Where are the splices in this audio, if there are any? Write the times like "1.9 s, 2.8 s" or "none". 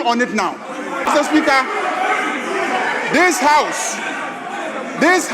1.1 s

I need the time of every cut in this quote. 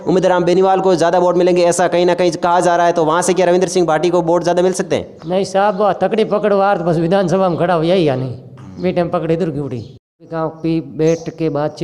10.3 s

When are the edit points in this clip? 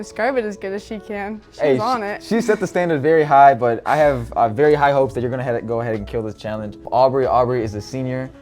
6.9 s

